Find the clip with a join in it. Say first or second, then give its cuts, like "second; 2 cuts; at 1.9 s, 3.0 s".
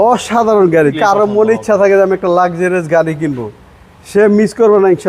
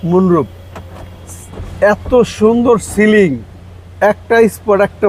first; 1 cut; at 0.9 s